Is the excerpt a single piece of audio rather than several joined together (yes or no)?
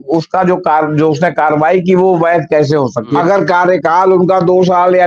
no